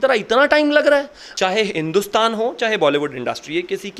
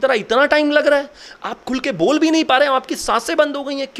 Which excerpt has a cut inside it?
first; 1 cut; at 1.2 s

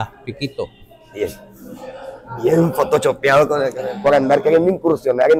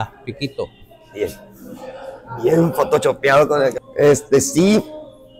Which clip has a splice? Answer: first; 1 cut; at 3.8 s

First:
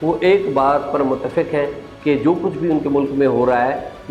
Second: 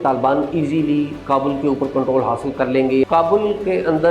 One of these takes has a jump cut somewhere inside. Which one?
second; 1 cut; at 3.0 s

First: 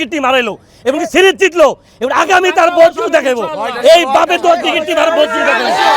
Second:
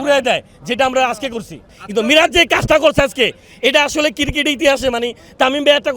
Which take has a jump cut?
second; 1 cut; at 1.8 s

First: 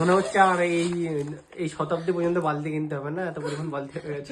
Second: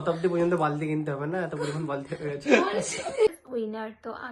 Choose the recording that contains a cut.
second; 1 cut; at 3.4 s

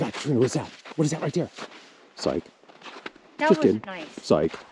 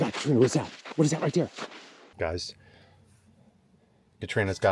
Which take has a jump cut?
second; 1 cut; at 2.0 s

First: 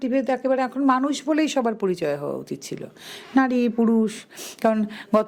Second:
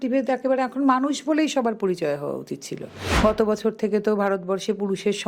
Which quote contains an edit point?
second; 1 cut; at 3.1 s

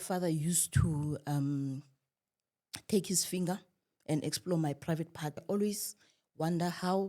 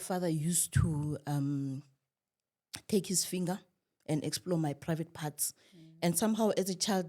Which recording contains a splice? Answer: first; 1 cut; at 5.4 s

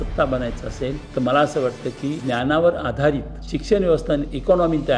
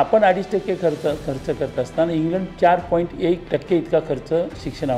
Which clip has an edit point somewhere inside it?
second; 1 cut; at 3.4 s

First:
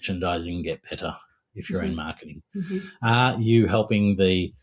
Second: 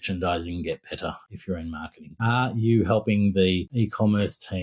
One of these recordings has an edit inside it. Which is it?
second; 2 cuts; at 1.5 s, 3.7 s

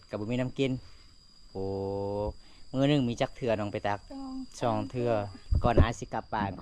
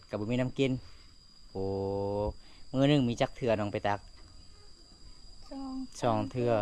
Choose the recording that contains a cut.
first; 2 cuts; at 4.1 s, 5.4 s

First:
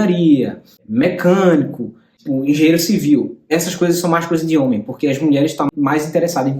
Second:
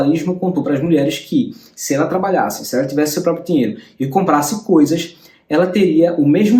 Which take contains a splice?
first; 2 cuts; at 2.1 s, 5.7 s

